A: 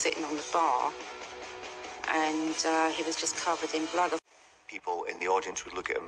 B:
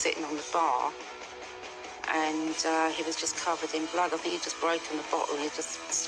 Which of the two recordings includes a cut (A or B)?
A